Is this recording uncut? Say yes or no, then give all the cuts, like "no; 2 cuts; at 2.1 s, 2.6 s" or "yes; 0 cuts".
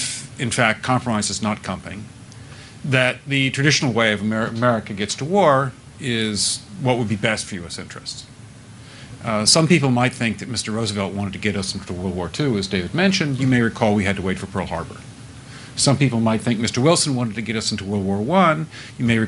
no; 2 cuts; at 8.6 s, 12.6 s